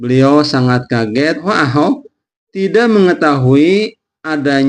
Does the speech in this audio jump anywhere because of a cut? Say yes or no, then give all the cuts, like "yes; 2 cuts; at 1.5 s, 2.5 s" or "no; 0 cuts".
yes; 1 cut; at 1.5 s